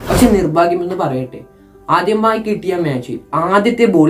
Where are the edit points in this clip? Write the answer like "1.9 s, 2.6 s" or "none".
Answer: none